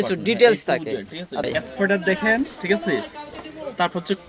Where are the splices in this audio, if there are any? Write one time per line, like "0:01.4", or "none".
0:01.5